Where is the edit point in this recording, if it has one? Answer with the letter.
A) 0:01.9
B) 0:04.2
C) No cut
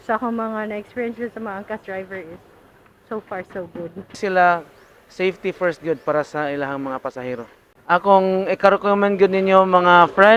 B